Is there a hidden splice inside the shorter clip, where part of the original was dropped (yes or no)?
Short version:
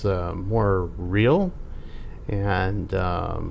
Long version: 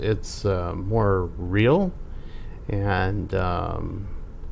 no